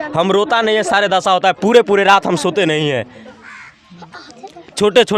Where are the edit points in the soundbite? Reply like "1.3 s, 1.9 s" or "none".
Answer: none